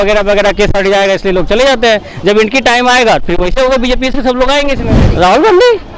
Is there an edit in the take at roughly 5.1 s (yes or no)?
yes